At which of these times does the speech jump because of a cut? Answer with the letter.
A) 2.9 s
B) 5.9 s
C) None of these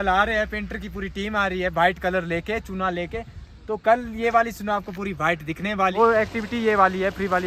B